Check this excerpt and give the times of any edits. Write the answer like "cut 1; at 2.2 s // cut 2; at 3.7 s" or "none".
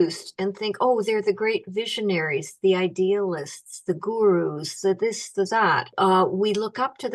cut 1; at 5.9 s